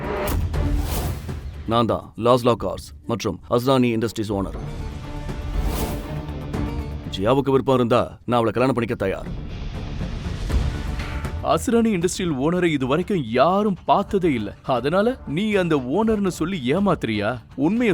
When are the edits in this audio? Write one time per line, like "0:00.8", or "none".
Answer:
0:07.0
0:11.3